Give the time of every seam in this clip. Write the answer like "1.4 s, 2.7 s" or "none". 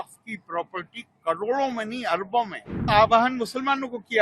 2.9 s